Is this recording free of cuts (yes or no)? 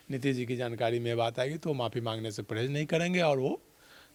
yes